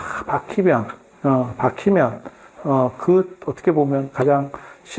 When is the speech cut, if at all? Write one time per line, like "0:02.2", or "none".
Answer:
none